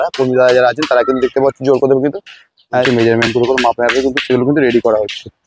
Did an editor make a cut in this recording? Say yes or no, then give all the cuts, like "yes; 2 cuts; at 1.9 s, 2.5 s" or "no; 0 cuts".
yes; 1 cut; at 2.9 s